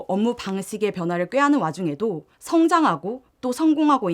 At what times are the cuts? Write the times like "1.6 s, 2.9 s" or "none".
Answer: 2.3 s

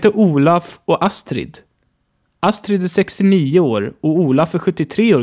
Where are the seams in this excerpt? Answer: 1.7 s

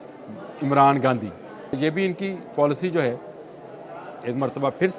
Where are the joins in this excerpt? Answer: 1.8 s

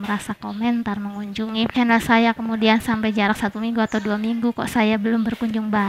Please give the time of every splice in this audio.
1.8 s

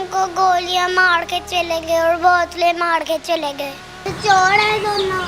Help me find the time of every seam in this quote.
3.9 s

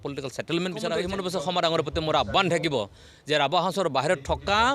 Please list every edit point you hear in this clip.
1.0 s

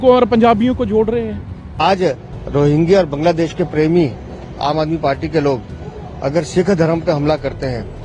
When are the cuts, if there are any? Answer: 1.7 s

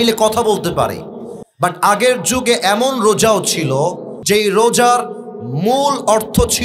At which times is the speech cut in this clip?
4.2 s

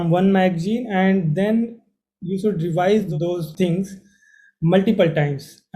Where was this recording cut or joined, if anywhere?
3.4 s

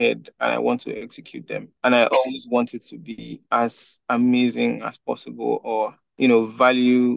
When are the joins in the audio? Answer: 1.7 s, 3.3 s, 3.9 s

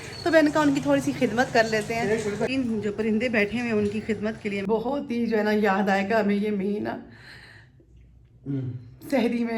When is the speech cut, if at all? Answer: 2.5 s, 4.6 s

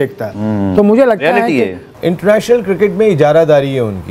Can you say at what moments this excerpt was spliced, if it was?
1.9 s

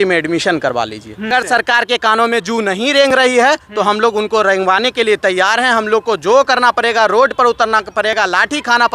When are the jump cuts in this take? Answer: 1.3 s

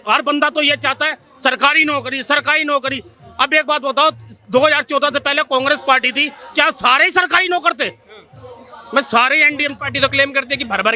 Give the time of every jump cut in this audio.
none

